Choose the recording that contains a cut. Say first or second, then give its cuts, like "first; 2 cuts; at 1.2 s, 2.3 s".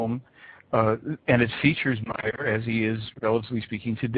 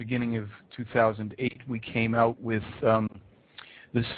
first; 1 cut; at 2.0 s